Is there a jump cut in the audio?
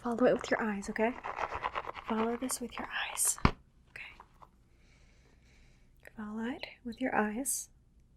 no; 0 cuts

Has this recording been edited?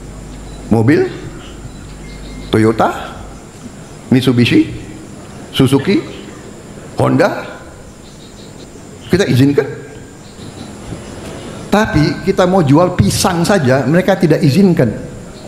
yes; 2 cuts; at 8.7 s, 10.4 s

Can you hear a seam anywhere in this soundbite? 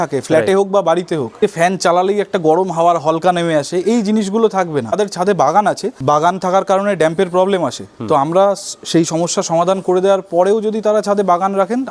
yes; 3 cuts; at 1.4 s, 4.9 s, 5.9 s

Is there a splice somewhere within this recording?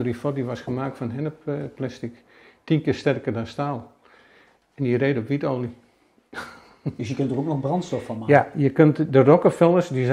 no; 0 cuts

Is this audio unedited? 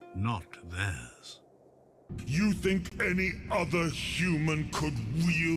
no; 1 cut; at 2.1 s

